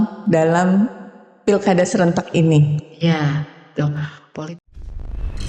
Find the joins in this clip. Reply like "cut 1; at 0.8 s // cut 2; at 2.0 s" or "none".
cut 1; at 4.3 s